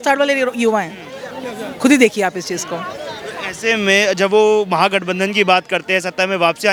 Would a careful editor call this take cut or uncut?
uncut